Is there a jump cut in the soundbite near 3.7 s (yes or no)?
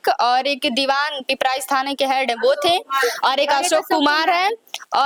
no